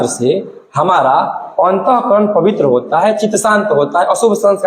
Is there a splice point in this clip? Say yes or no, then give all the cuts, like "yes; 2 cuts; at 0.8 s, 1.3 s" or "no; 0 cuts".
no; 0 cuts